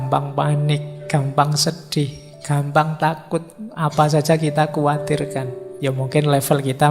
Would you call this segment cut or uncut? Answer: cut